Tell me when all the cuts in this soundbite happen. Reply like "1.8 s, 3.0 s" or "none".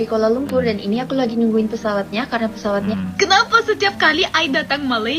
2.9 s